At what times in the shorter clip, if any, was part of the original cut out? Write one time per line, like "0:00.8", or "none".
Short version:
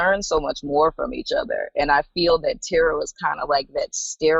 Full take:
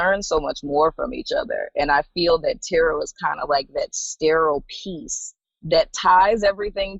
none